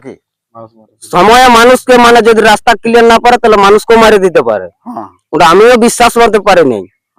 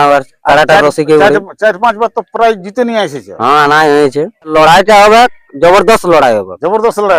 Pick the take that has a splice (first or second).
second